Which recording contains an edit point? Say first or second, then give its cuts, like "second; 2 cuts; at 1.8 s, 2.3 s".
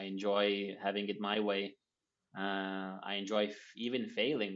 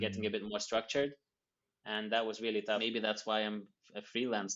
second; 1 cut; at 2.8 s